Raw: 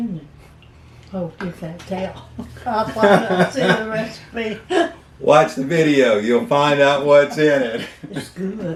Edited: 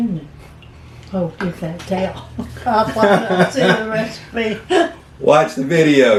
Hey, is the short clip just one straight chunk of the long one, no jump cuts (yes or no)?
yes